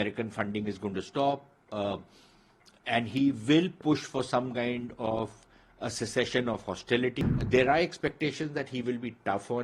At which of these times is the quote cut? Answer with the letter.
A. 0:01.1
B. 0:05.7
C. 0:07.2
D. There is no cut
C